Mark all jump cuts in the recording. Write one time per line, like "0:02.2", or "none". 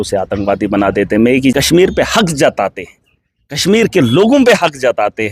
0:01.5